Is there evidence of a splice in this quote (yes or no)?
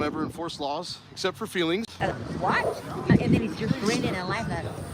yes